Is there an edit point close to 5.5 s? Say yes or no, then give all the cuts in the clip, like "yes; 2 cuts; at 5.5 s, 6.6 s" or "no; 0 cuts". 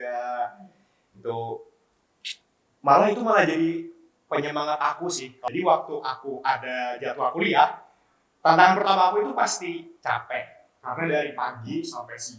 yes; 1 cut; at 5.5 s